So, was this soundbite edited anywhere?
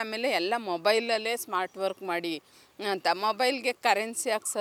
no; 0 cuts

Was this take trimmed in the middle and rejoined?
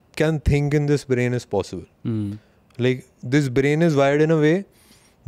no; 0 cuts

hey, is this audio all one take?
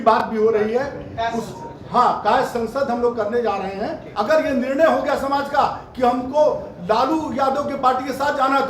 no; 1 cut; at 4.0 s

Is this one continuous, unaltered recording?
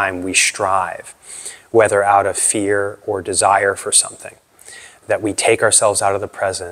yes; 0 cuts

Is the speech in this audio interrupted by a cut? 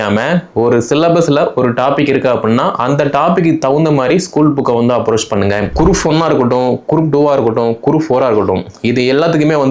yes; 1 cut; at 5.7 s

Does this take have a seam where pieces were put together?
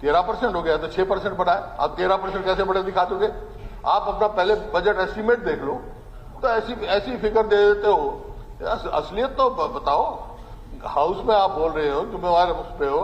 no; 0 cuts

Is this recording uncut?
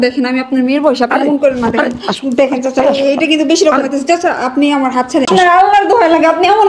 no; 1 cut; at 5.3 s

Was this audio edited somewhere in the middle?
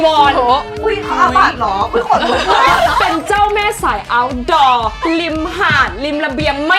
yes; 1 cut; at 3.1 s

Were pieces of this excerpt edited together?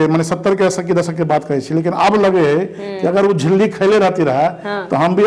no; 0 cuts

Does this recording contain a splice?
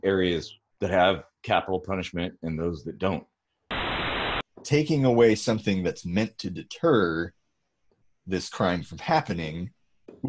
yes; 1 cut; at 4.0 s

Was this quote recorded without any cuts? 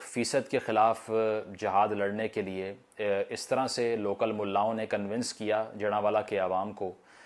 yes; 0 cuts

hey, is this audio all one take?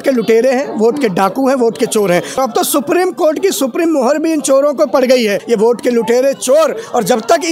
no; 2 cuts; at 2.4 s, 5.4 s

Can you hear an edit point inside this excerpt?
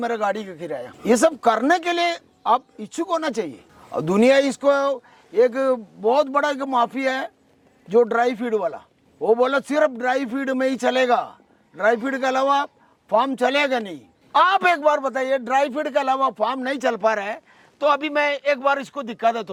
no; 0 cuts

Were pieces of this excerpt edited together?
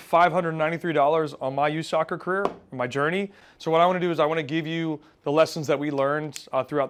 no; 0 cuts

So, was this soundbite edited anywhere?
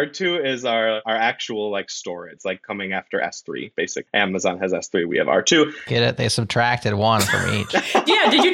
yes; 3 cuts; at 1.0 s, 2.4 s, 4.0 s

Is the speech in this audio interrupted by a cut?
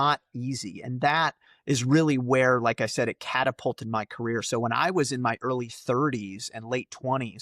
no; 0 cuts

